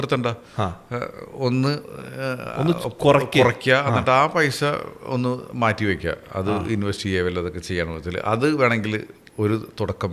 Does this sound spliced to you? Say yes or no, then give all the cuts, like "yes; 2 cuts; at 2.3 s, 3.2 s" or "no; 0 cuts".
no; 0 cuts